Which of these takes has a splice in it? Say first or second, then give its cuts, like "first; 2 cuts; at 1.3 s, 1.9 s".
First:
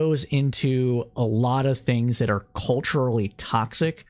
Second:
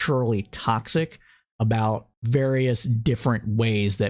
second; 1 cut; at 2.1 s